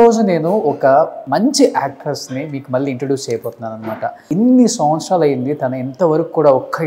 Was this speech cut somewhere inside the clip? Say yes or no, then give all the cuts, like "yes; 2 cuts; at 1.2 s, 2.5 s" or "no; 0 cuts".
yes; 2 cuts; at 1.2 s, 4.2 s